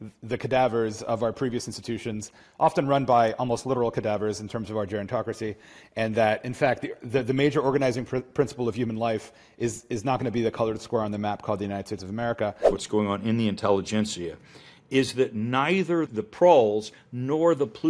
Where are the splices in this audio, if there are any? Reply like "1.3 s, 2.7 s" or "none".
12.8 s, 16.1 s